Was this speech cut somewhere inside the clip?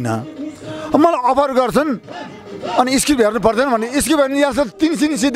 no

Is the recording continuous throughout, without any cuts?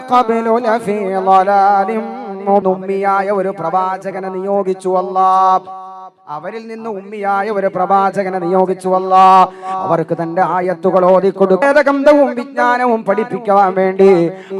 no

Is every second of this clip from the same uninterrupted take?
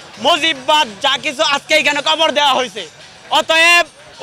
yes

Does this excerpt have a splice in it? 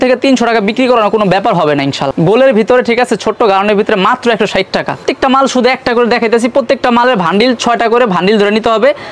no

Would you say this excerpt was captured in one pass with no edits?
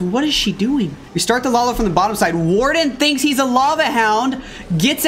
no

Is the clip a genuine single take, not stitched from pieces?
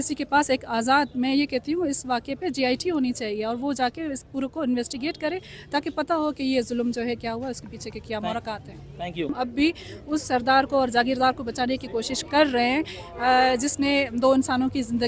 no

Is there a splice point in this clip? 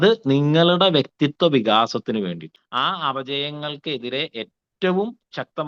yes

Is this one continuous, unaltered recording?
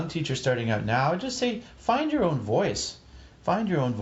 yes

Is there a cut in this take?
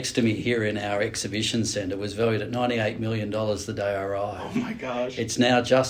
no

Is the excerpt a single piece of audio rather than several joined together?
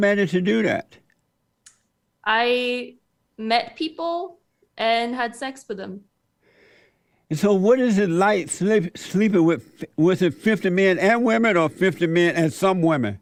yes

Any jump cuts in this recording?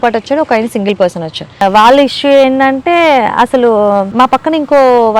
yes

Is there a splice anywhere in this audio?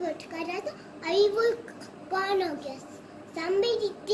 no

